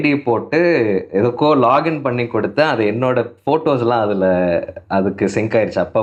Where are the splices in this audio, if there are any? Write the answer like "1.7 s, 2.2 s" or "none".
none

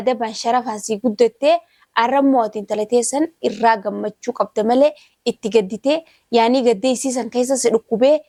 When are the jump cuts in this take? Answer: none

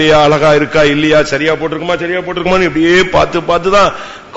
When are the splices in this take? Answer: none

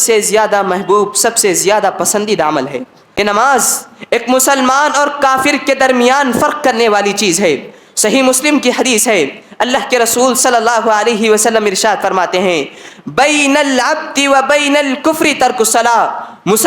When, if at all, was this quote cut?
3.0 s

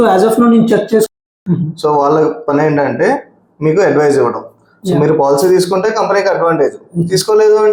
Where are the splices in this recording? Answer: 1.1 s

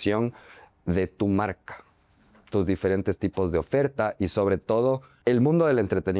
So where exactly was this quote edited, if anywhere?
5.1 s

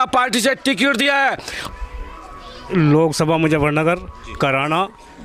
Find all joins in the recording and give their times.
1.6 s

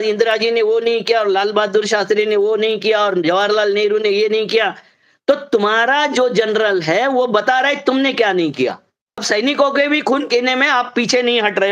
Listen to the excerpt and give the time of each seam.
9.2 s

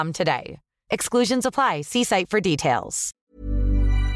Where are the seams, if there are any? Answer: 3.2 s

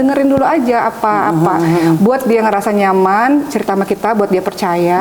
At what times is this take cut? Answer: none

